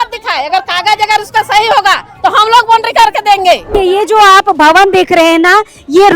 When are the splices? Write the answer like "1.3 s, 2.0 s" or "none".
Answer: 3.6 s